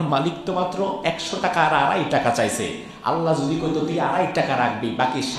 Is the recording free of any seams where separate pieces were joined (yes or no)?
yes